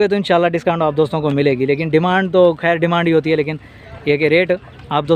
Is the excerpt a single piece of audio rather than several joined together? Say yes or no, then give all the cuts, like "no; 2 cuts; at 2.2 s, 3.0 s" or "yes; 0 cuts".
yes; 0 cuts